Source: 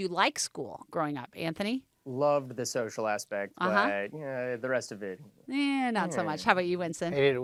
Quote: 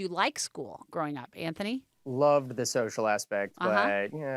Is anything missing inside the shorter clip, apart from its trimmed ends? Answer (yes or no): no